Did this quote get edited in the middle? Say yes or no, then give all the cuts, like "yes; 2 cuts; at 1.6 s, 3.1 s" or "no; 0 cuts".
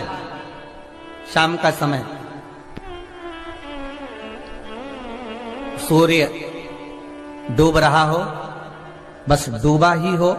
no; 0 cuts